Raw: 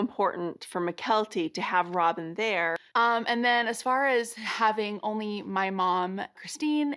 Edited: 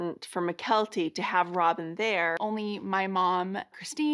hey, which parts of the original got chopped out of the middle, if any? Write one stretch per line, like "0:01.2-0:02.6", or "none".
0:02.8-0:05.0